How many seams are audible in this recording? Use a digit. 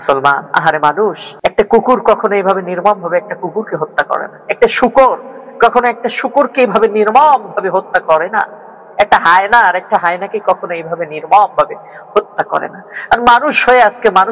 1